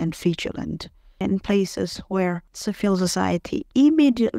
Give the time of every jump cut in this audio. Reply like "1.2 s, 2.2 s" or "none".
1.2 s, 2.5 s